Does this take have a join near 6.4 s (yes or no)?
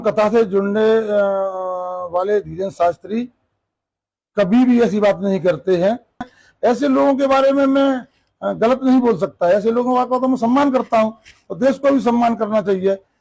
yes